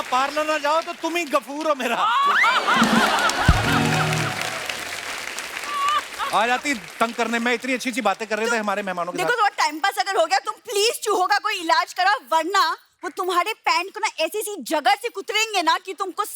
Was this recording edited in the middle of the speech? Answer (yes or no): no